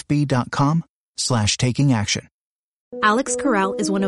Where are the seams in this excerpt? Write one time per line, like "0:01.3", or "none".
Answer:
0:02.9